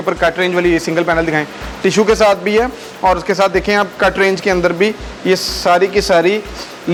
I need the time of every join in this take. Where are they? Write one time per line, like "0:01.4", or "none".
none